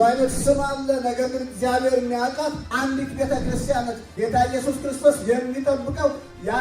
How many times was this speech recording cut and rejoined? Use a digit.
2